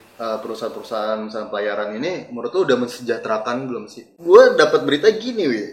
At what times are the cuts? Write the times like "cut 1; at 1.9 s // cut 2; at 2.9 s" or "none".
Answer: cut 1; at 4.1 s